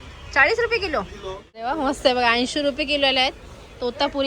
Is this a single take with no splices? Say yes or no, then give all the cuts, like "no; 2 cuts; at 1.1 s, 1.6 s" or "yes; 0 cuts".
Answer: no; 1 cut; at 1.6 s